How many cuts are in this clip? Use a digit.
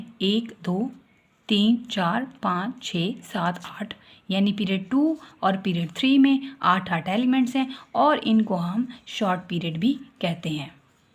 0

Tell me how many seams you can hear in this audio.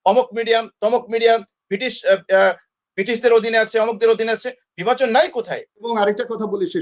1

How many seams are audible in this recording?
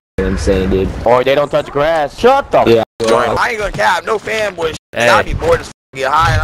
3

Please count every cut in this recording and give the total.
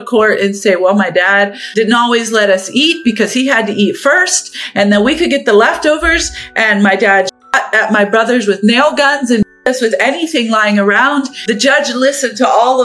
2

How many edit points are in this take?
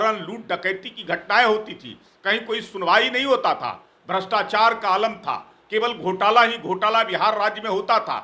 0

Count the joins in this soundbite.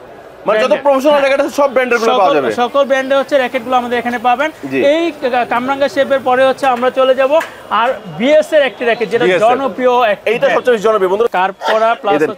1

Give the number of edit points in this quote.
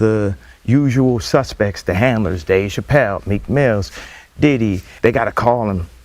1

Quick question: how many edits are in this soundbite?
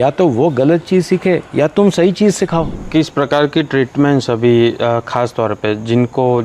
1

